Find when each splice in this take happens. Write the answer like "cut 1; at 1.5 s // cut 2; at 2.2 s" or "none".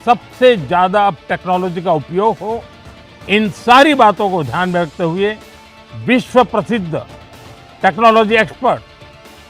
none